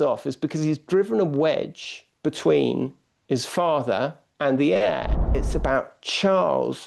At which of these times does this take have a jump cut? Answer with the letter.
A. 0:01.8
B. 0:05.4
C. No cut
B